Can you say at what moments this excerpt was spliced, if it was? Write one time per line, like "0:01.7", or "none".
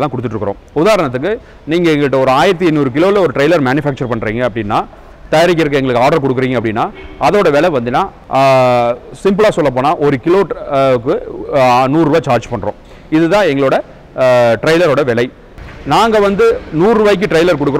0:08.2
0:15.5